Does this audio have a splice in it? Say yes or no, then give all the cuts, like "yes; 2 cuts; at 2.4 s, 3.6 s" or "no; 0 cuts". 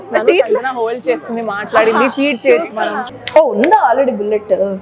yes; 1 cut; at 3.1 s